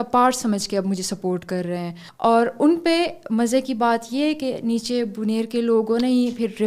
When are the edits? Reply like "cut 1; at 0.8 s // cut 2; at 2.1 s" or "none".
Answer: cut 1; at 2.0 s